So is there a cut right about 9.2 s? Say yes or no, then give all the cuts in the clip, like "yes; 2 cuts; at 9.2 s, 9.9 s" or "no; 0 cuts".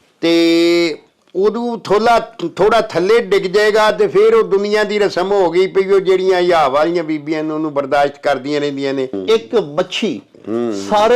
yes; 1 cut; at 9.2 s